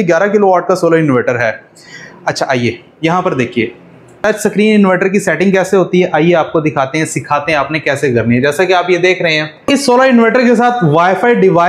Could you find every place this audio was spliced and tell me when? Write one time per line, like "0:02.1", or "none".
0:04.1
0:09.7